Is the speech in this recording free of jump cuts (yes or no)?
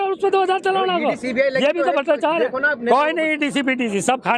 yes